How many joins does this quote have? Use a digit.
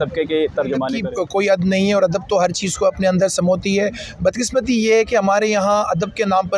1